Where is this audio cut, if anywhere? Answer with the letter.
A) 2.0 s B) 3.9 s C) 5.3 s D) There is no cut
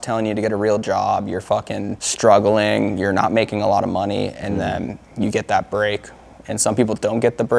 A